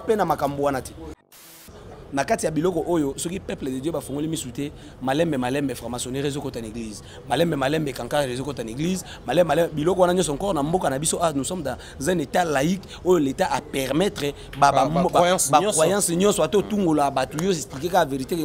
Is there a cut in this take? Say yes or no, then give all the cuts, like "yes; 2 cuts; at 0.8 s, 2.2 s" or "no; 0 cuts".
yes; 1 cut; at 1.7 s